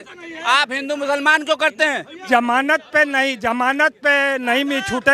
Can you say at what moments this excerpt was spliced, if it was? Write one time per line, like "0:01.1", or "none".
0:02.2